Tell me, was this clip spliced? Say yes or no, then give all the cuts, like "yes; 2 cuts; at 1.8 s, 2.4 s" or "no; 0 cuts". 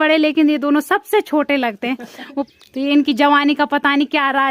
yes; 1 cut; at 2.5 s